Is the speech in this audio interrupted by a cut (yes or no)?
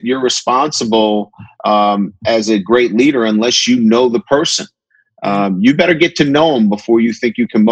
no